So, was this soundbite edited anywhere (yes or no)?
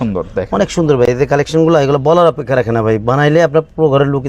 no